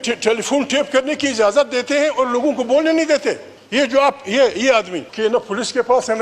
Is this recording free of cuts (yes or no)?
no